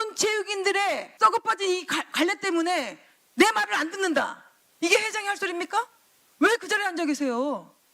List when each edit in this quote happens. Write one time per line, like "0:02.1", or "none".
0:01.1